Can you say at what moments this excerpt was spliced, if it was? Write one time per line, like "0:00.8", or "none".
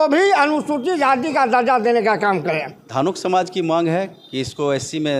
0:02.7